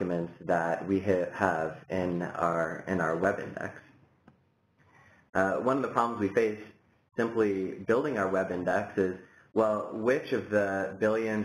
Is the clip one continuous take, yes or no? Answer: no